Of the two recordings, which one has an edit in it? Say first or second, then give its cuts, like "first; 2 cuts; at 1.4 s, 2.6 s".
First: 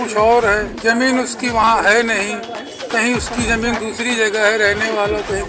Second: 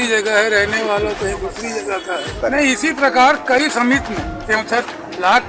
second; 1 cut; at 2.4 s